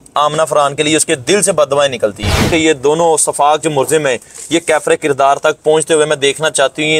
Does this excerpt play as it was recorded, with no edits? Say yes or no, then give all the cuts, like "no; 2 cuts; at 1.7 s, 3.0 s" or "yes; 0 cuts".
no; 1 cut; at 2.5 s